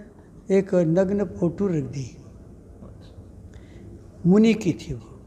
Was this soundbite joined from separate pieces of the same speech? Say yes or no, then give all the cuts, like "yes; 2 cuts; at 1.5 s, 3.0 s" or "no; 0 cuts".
no; 0 cuts